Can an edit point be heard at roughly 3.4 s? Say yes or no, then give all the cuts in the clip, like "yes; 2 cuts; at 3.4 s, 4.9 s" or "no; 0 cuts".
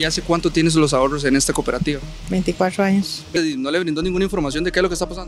yes; 1 cut; at 3.4 s